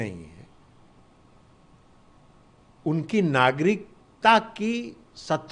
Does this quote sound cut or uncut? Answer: uncut